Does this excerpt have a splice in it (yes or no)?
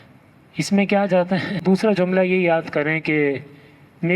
yes